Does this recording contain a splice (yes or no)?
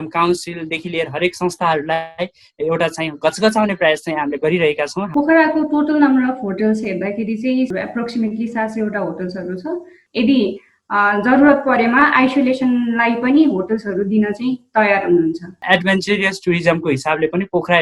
yes